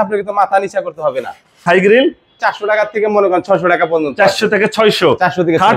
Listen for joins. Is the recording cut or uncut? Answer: cut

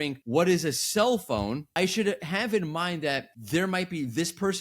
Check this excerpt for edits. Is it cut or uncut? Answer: cut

